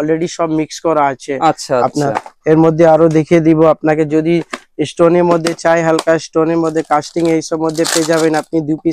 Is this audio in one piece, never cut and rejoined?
yes; 0 cuts

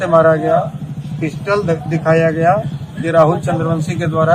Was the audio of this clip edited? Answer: no; 0 cuts

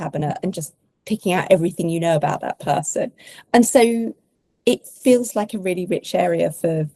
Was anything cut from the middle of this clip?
no; 0 cuts

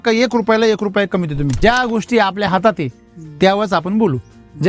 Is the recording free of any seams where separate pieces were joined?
no; 1 cut; at 1.6 s

